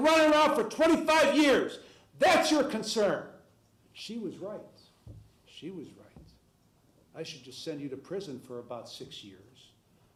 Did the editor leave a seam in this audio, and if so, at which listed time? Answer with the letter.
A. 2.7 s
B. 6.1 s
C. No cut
C